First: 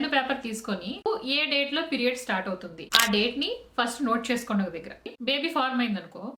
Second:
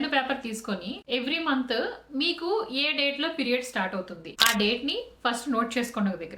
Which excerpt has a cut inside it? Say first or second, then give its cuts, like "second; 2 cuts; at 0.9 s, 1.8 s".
first; 2 cuts; at 1.1 s, 5.1 s